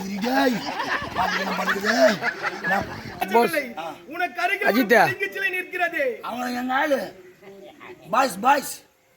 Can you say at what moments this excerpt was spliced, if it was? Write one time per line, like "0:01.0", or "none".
0:03.3

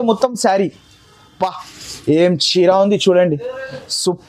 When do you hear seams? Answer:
none

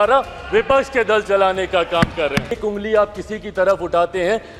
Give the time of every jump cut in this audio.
0:02.6

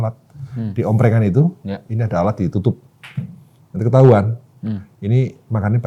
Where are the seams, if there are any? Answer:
none

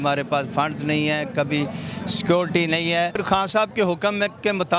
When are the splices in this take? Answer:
0:03.2

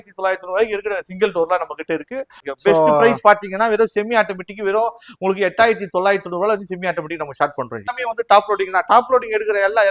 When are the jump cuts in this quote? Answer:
0:02.4
0:08.0

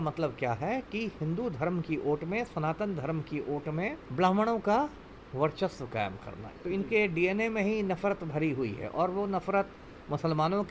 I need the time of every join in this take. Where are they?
0:04.0
0:06.4

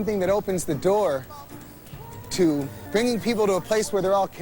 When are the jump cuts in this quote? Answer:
0:02.8

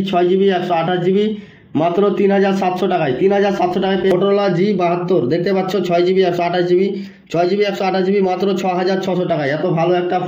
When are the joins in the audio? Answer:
0:04.1

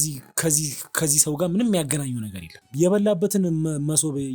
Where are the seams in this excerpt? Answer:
0:02.7

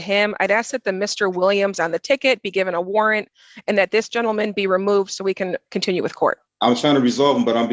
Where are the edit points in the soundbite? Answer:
0:06.5

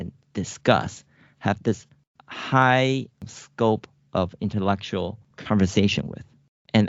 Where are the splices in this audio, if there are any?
0:03.2

